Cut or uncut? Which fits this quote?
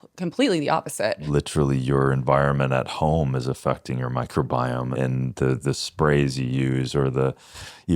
cut